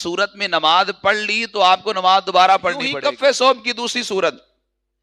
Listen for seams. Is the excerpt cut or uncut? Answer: cut